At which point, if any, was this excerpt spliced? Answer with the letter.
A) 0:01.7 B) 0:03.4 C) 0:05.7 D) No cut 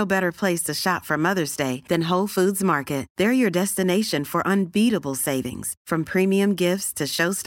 D